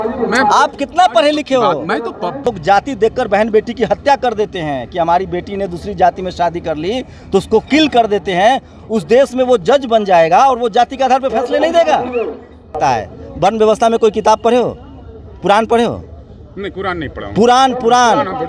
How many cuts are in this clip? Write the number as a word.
two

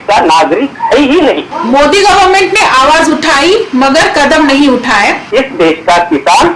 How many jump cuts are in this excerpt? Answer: two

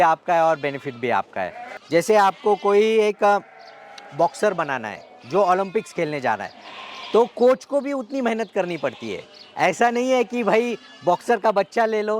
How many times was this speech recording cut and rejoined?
one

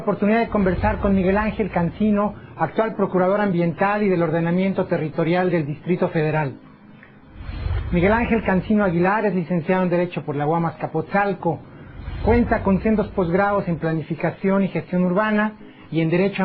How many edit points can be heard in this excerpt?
one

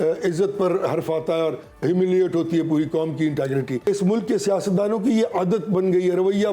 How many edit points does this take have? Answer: one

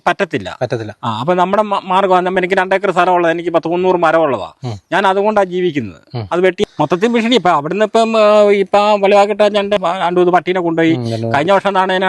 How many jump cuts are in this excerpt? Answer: two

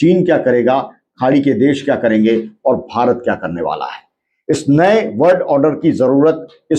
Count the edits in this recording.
zero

